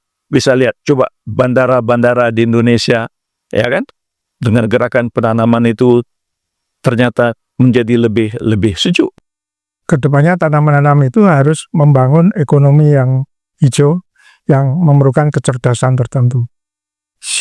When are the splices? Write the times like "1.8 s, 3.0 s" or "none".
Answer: 9.1 s